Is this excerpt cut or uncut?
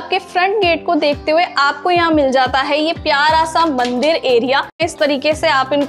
cut